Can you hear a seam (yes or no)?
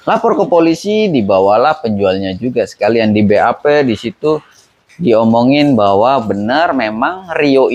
no